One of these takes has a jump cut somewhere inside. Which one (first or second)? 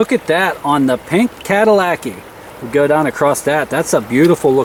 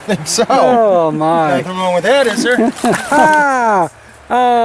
second